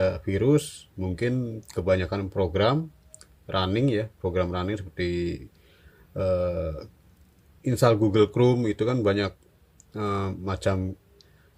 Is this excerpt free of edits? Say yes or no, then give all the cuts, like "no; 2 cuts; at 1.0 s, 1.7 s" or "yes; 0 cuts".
yes; 0 cuts